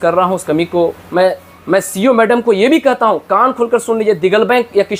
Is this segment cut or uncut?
cut